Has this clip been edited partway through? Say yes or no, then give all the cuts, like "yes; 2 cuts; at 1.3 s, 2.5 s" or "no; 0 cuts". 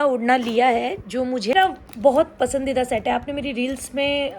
yes; 1 cut; at 1.5 s